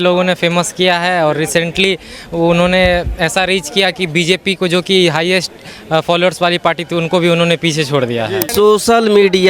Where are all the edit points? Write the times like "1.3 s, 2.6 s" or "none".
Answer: 8.5 s